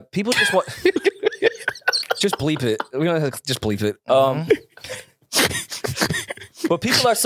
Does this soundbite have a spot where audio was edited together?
no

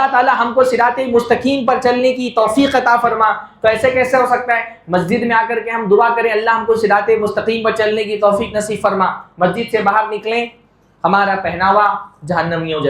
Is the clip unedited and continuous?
yes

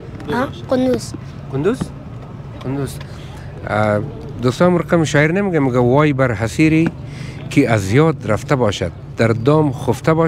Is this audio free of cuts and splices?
yes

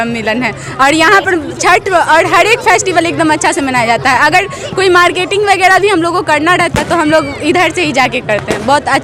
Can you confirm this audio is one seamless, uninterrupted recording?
yes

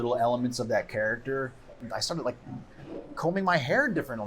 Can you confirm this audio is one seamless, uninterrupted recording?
no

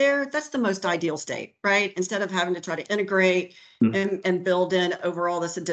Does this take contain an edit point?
no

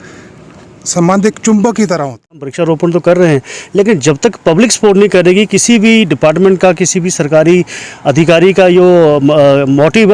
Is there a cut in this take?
yes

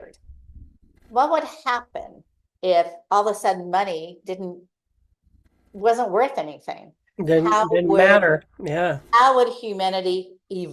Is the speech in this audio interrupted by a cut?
no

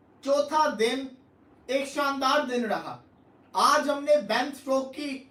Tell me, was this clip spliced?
no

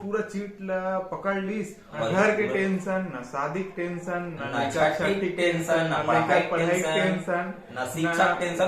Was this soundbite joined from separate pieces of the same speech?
yes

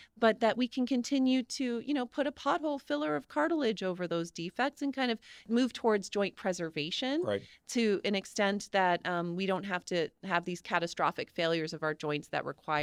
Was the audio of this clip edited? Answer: no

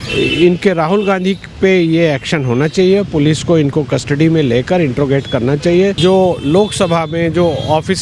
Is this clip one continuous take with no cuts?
no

